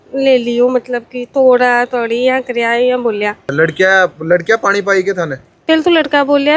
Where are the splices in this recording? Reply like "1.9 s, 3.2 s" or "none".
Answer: 3.4 s

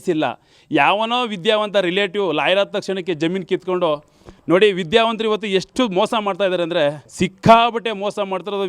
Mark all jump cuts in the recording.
7.0 s

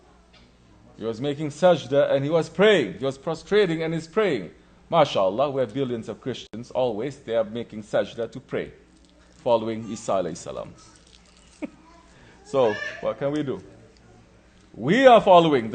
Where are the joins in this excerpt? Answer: 1.1 s

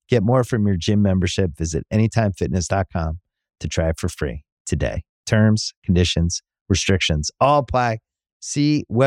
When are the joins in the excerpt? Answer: none

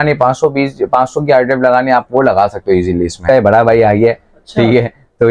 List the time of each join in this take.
3.3 s

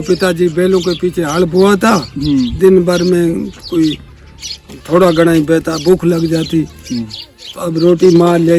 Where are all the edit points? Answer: none

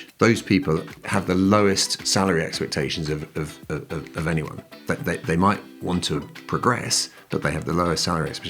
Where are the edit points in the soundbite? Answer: 1.0 s

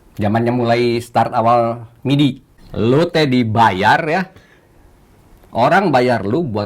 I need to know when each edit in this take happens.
2.5 s

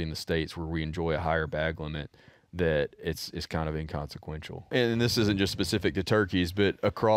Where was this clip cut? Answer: 4.7 s

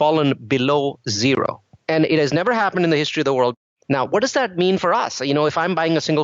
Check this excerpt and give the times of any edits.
1.7 s, 3.6 s

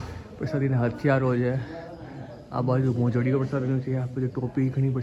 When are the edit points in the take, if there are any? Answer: none

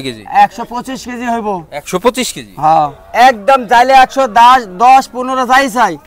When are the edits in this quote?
3.0 s

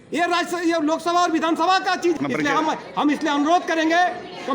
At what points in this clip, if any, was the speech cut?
2.1 s

